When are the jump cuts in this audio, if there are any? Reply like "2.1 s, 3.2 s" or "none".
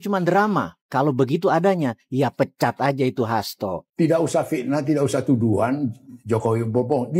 3.8 s

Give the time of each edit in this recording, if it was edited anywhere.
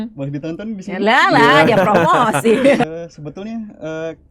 2.8 s

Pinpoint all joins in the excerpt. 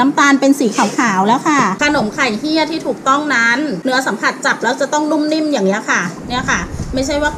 1.8 s, 3.8 s

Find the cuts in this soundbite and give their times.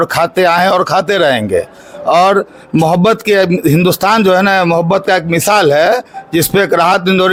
none

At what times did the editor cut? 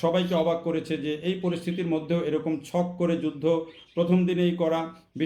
none

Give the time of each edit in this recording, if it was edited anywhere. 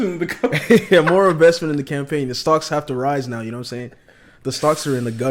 none

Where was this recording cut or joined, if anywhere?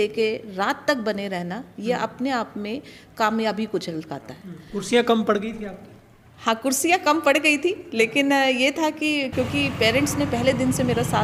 none

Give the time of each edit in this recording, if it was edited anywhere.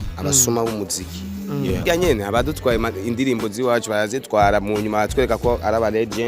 1.8 s

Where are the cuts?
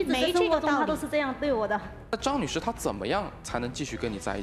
1.9 s

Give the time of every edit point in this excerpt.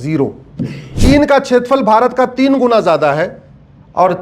0.9 s

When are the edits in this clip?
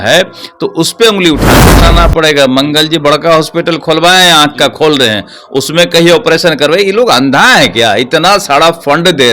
1.8 s

